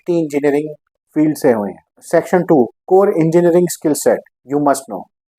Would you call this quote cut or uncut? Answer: uncut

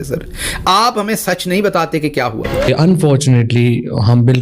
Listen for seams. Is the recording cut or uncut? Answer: cut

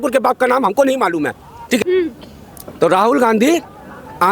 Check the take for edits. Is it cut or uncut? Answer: cut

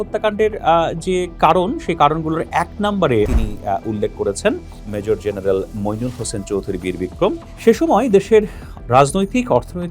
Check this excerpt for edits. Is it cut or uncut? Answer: cut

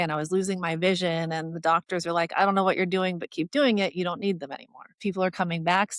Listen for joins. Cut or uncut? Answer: cut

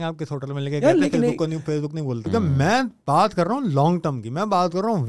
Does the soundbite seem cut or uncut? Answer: cut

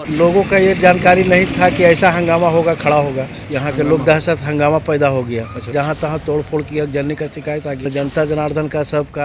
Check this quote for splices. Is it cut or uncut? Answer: cut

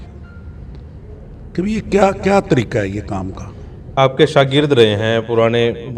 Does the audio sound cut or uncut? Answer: cut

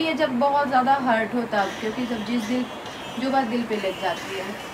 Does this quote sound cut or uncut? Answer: uncut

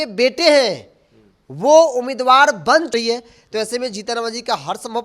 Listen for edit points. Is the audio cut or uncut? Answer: cut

